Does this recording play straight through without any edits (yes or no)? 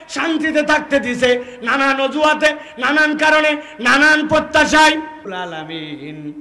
no